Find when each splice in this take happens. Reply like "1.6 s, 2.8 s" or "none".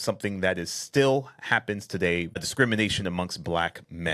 2.4 s